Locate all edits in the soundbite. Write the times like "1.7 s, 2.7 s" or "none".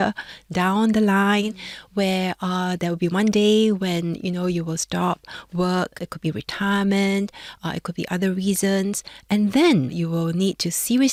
none